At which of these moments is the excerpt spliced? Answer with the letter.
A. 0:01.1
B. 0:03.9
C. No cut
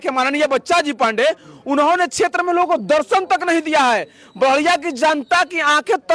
C